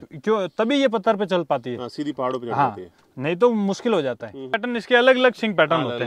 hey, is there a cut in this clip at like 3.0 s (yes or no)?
no